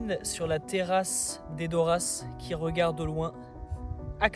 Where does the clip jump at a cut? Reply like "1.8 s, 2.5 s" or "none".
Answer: none